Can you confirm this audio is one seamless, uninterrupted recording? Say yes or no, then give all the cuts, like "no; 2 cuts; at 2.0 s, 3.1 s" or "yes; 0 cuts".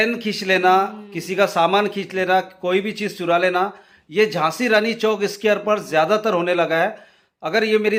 yes; 0 cuts